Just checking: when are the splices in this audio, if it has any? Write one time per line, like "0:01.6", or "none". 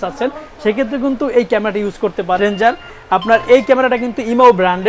0:02.4